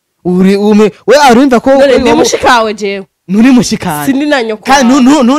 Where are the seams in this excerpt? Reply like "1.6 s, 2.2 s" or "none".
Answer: none